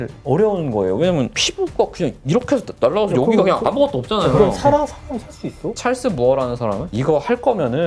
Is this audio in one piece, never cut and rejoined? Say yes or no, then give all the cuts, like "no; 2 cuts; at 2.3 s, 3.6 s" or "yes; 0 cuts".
no; 1 cut; at 5.7 s